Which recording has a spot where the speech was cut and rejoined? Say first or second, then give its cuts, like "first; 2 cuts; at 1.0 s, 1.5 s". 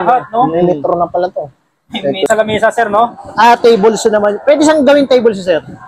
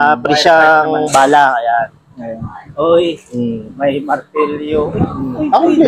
first; 1 cut; at 2.3 s